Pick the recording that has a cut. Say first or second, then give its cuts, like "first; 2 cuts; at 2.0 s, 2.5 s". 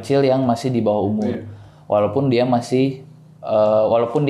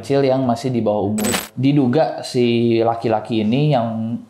second; 1 cut; at 1.5 s